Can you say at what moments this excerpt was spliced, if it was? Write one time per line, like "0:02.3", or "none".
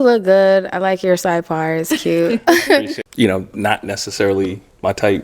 0:03.0